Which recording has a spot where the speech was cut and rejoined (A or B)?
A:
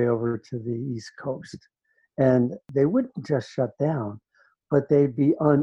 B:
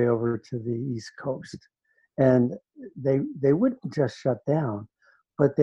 A